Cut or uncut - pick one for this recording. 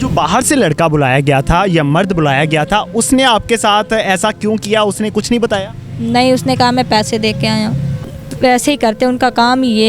cut